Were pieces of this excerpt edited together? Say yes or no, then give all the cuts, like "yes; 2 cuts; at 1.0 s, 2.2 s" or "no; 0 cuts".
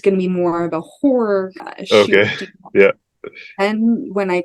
yes; 1 cut; at 1.6 s